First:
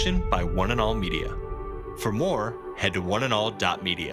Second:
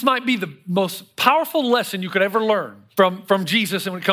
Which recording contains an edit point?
second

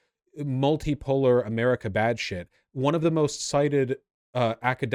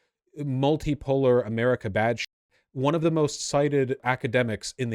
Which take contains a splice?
second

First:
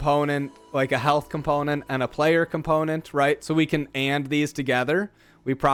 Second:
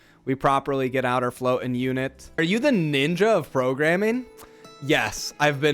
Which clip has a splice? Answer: second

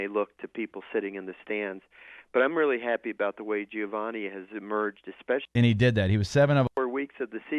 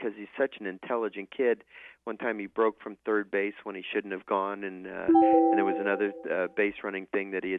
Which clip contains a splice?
first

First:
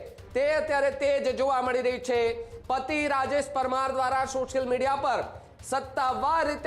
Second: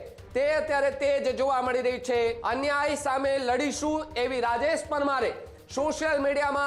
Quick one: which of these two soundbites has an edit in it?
second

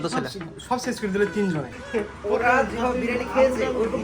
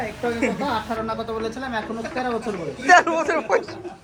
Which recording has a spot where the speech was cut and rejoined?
first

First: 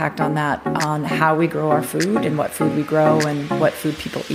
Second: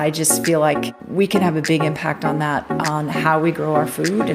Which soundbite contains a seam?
second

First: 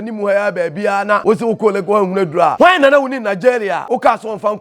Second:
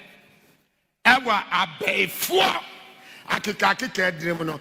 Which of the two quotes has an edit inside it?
first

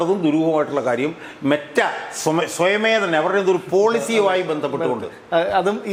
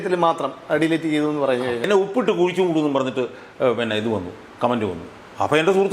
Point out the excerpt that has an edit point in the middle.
second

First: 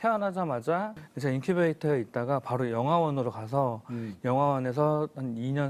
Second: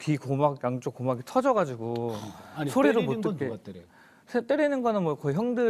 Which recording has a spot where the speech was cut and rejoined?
first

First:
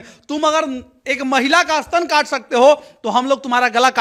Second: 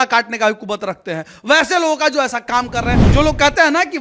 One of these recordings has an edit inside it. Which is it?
second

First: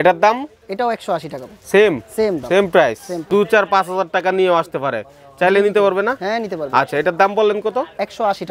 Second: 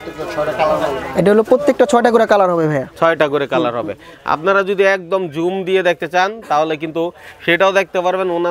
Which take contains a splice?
first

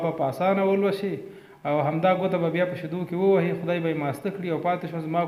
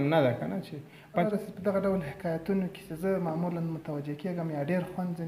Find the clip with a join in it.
second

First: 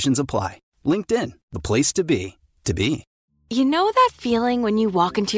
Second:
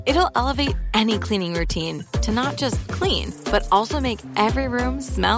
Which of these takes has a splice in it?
first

